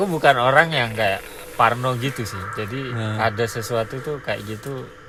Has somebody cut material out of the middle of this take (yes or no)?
no